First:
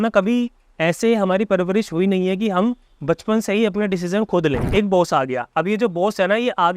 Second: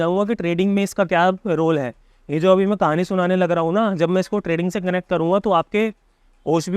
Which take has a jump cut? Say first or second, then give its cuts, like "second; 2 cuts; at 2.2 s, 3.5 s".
first; 1 cut; at 4.6 s